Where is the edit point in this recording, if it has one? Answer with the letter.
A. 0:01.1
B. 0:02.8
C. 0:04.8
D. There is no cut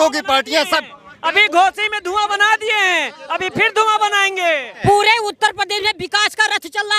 C